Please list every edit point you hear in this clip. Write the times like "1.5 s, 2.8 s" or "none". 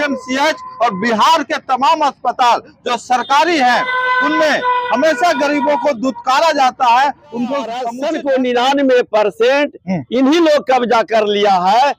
7.9 s